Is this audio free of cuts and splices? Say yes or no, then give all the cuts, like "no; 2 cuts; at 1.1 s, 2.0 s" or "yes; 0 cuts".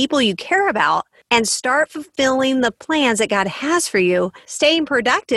no; 1 cut; at 4.4 s